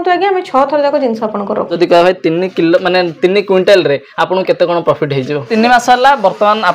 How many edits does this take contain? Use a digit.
2